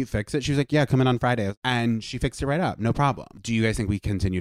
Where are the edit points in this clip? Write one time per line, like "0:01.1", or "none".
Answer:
0:01.6
0:03.3

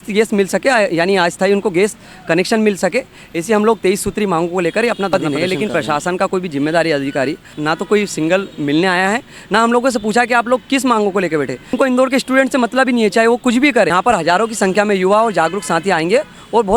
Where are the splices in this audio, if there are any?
0:05.1
0:07.5
0:11.8
0:13.9

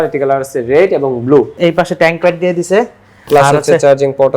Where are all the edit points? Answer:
0:01.5

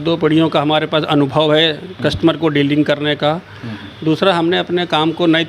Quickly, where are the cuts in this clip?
none

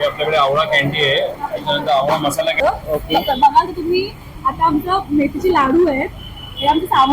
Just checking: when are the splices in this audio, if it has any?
0:02.6

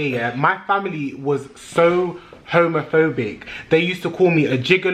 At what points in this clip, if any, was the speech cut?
none

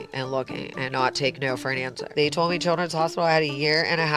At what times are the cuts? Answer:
0:02.0

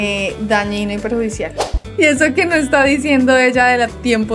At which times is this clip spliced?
0:01.7

